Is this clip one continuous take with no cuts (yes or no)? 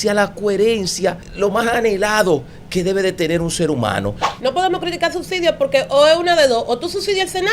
no